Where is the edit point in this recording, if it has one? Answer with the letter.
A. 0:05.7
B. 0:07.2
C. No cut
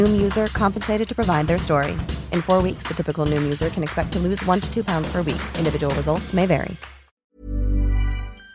B